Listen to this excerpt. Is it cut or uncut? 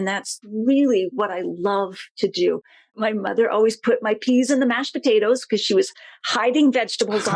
cut